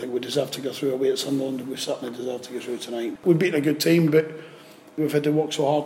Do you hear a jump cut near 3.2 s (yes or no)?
yes